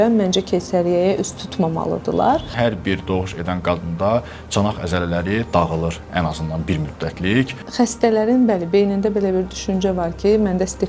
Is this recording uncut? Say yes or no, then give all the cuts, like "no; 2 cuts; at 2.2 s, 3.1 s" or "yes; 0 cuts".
no; 2 cuts; at 2.5 s, 7.6 s